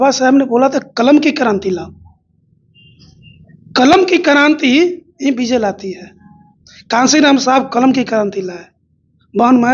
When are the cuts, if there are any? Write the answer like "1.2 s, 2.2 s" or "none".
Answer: none

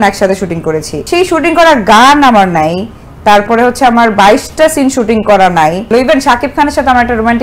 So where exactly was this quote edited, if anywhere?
0.9 s, 5.8 s

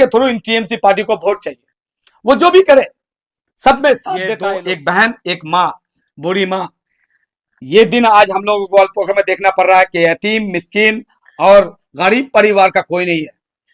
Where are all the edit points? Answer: 4.3 s

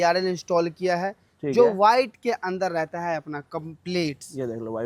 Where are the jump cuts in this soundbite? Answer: none

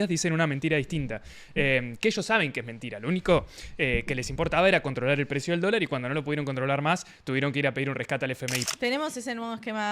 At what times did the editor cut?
8.6 s

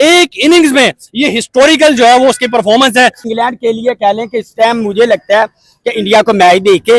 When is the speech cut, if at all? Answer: 3.3 s

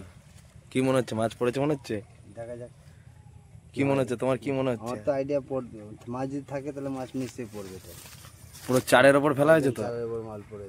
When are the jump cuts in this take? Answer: none

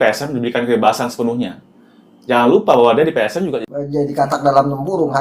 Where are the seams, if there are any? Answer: 3.7 s

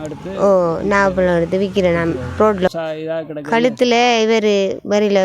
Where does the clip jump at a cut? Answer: 2.7 s

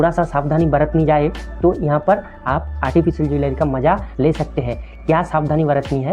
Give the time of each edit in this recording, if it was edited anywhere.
none

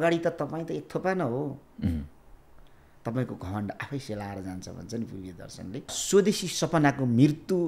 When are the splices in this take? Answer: 6.0 s

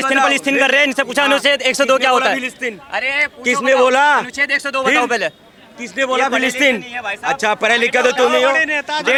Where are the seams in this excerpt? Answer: none

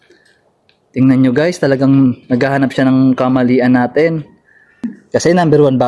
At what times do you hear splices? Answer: 4.9 s

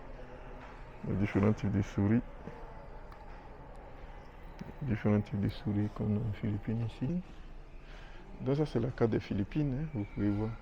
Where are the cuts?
7.1 s

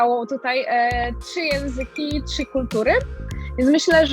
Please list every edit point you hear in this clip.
3.2 s

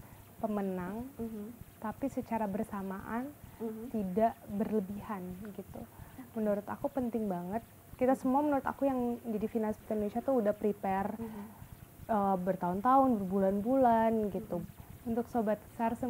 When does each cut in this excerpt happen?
14.7 s

